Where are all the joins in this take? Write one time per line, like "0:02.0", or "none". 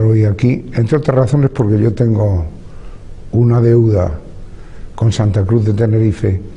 none